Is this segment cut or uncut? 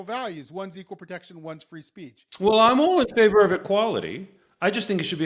cut